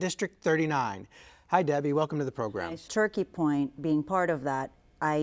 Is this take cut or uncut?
uncut